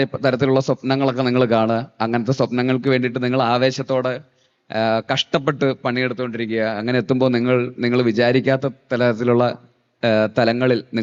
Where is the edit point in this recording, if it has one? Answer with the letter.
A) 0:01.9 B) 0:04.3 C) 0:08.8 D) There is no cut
D